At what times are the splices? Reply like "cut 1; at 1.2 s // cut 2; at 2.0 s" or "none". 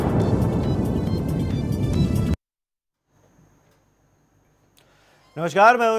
cut 1; at 1.4 s